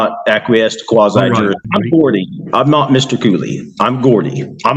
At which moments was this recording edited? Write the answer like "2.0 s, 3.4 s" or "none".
1.6 s